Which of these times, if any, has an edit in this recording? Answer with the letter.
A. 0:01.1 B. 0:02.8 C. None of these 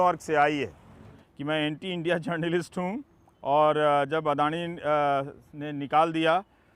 A